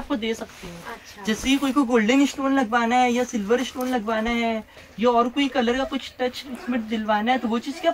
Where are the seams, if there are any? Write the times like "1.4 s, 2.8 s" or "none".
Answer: none